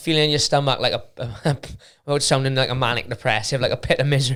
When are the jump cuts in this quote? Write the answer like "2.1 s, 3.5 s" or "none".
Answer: none